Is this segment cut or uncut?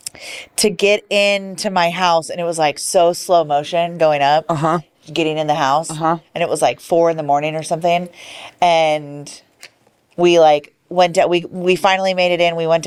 uncut